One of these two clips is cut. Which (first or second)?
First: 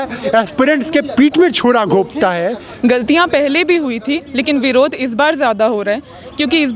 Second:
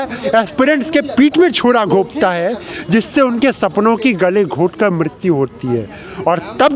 first